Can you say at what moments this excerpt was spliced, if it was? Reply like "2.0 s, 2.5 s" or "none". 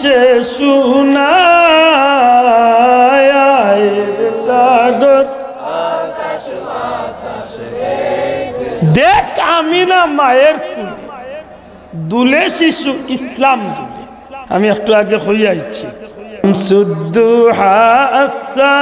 16.4 s

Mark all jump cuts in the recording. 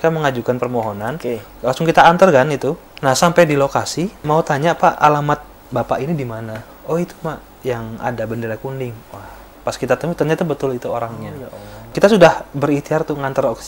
2.9 s, 4.2 s, 11.9 s

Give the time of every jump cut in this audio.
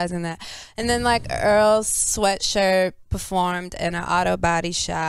4.0 s

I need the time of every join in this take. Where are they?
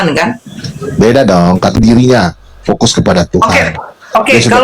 1.8 s

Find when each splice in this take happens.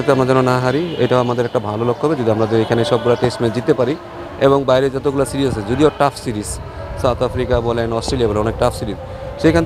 none

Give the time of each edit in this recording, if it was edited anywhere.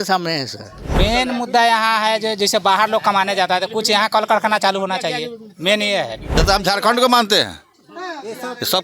1.0 s, 6.4 s

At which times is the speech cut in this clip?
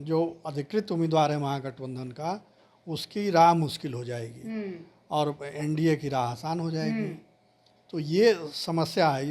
none

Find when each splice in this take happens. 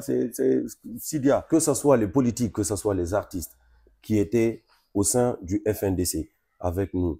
1.3 s

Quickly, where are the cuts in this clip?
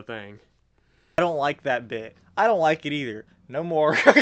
1.2 s

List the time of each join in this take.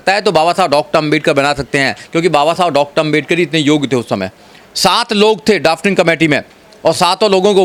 none

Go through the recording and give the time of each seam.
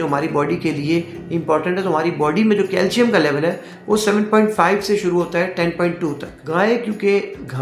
6.3 s

